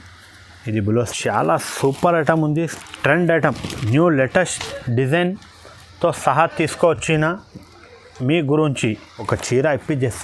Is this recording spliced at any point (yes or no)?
yes